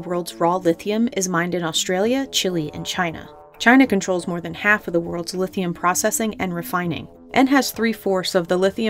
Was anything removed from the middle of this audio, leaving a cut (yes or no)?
no